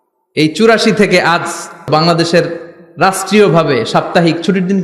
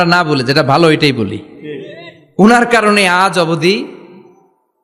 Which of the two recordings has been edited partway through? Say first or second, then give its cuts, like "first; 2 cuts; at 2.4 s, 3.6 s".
first; 1 cut; at 1.9 s